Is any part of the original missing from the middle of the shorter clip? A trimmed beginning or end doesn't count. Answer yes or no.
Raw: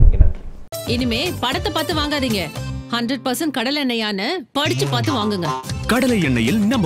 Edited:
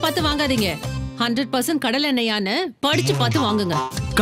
no